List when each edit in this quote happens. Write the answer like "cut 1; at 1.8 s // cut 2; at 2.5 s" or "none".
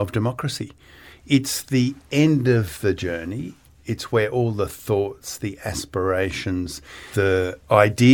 cut 1; at 7.1 s